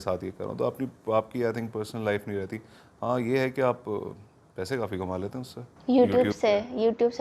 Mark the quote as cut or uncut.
uncut